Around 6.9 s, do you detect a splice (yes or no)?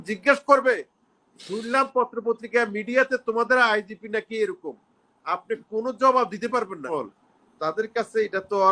yes